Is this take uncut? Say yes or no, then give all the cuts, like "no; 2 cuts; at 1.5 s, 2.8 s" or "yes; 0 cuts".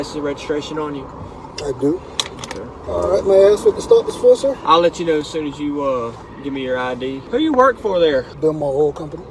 no; 3 cuts; at 2.8 s, 7.2 s, 8.3 s